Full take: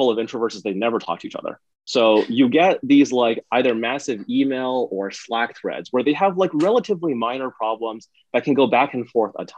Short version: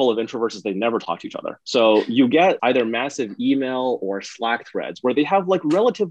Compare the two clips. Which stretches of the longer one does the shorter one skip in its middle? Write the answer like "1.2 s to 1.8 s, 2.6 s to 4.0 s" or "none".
1.5 s to 1.7 s, 2.8 s to 3.5 s